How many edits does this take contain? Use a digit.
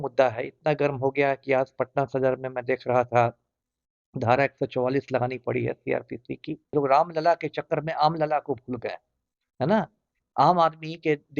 1